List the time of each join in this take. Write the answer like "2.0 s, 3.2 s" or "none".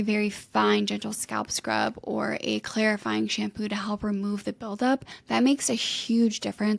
none